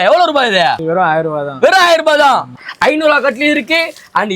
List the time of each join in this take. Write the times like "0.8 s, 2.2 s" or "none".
2.6 s